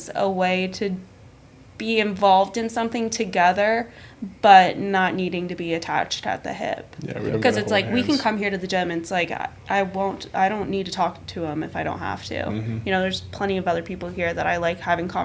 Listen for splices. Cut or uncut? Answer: uncut